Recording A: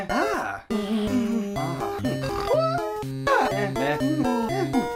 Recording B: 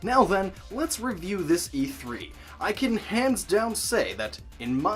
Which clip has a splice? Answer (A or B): B